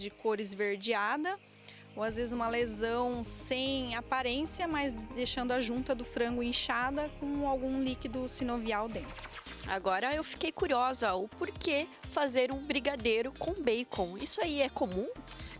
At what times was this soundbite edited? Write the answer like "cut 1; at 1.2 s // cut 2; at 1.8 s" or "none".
cut 1; at 9.5 s